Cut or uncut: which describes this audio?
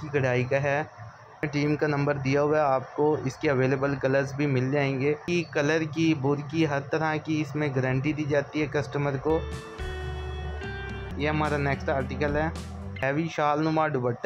cut